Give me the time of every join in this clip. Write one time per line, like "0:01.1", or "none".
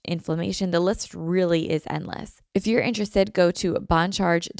0:02.3